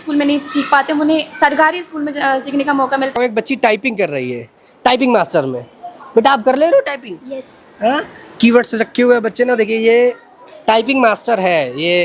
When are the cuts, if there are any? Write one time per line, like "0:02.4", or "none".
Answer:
0:03.1